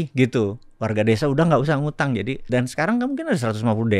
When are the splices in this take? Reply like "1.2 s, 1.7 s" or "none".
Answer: 2.4 s